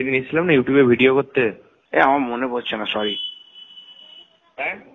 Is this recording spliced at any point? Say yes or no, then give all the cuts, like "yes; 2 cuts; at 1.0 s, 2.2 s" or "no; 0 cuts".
no; 0 cuts